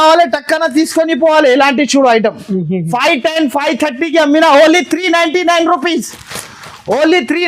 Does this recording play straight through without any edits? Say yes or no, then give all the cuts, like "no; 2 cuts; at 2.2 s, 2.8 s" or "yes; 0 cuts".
yes; 0 cuts